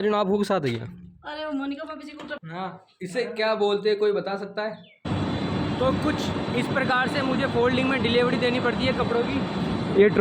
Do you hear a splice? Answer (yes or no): yes